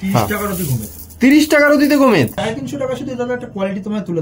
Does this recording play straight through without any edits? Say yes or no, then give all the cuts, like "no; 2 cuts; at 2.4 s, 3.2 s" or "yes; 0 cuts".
no; 1 cut; at 2.4 s